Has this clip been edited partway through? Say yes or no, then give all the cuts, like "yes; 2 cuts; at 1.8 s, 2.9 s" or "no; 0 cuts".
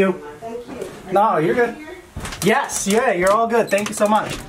no; 0 cuts